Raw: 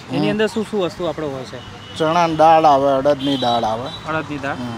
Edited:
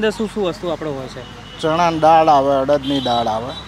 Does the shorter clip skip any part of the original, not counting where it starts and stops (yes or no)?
no